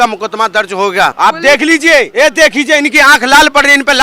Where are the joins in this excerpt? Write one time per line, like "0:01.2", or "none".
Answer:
0:01.2
0:02.1